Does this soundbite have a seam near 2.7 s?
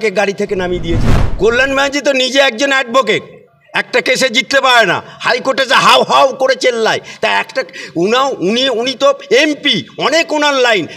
no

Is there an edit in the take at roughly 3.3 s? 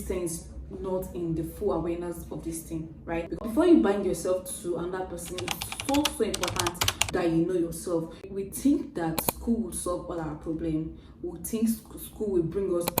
yes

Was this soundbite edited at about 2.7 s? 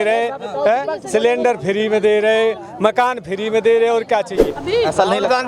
no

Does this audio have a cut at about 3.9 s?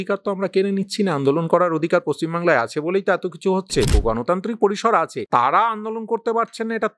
yes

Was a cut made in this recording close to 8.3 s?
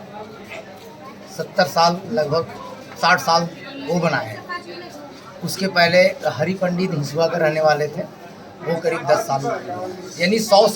no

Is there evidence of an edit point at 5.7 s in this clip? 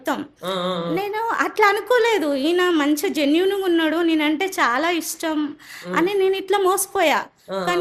no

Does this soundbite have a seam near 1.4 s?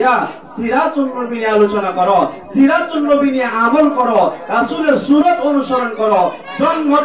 no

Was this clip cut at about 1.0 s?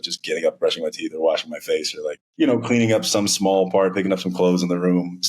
no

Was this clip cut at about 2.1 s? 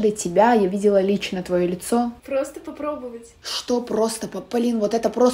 yes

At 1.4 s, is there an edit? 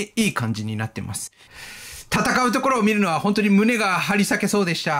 yes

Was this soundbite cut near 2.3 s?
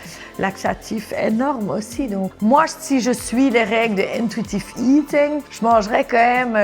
yes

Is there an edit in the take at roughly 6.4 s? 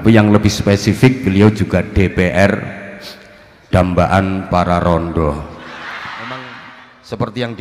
yes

